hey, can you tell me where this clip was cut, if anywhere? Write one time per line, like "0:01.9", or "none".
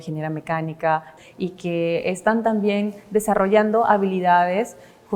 0:01.1